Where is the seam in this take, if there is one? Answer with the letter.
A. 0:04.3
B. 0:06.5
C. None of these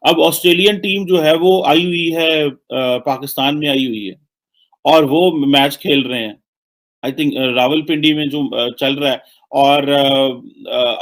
C